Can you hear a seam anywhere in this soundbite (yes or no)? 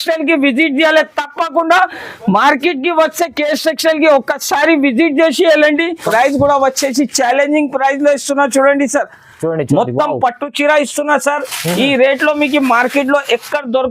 yes